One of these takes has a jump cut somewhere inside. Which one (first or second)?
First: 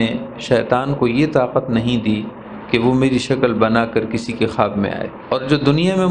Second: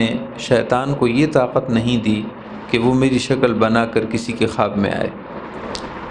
first